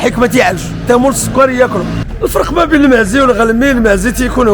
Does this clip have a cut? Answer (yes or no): yes